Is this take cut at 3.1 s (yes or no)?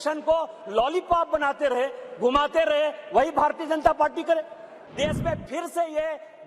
no